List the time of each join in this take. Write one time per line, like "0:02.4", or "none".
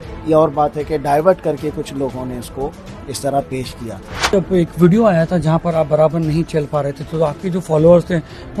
0:04.3